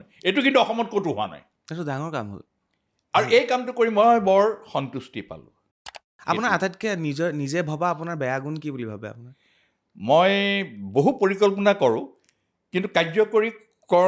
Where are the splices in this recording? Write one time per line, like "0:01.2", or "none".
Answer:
0:01.5
0:06.1